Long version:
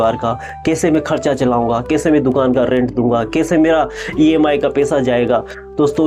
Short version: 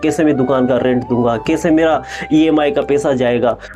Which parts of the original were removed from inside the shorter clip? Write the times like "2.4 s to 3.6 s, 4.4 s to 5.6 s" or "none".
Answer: none